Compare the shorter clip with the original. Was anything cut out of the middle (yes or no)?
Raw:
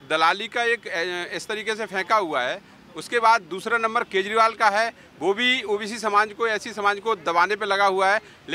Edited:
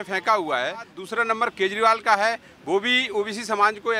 yes